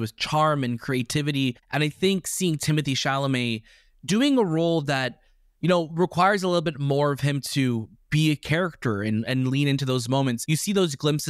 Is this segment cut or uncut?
cut